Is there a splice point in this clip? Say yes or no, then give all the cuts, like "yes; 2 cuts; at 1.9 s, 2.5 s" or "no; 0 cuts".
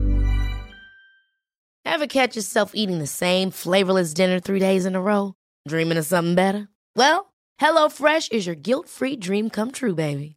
yes; 1 cut; at 1.6 s